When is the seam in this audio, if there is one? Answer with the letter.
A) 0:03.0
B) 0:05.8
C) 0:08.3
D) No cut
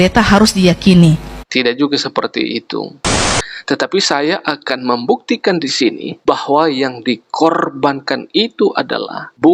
A